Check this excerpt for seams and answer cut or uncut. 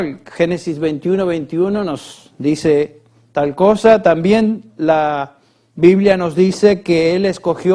uncut